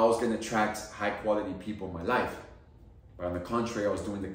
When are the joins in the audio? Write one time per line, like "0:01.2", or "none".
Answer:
none